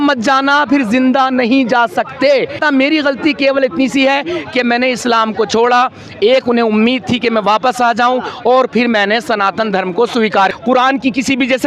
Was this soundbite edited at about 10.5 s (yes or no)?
yes